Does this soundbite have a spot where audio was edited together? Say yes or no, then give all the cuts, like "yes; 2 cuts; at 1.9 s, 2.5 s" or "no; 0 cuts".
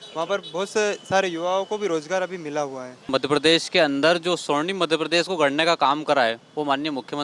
yes; 1 cut; at 3.1 s